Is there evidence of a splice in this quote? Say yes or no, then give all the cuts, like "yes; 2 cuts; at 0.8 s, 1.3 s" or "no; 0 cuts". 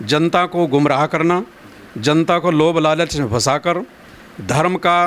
no; 0 cuts